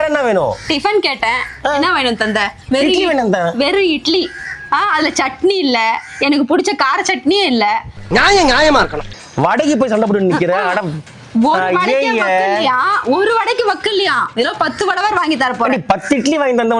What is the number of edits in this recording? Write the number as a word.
one